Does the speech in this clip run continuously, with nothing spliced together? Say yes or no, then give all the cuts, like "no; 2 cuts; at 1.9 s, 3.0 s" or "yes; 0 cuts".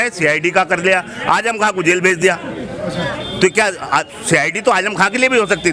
yes; 0 cuts